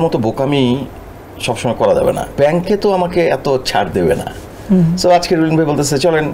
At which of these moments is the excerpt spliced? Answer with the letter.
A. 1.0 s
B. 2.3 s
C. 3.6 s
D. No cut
B